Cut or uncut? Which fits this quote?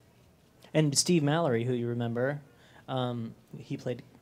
uncut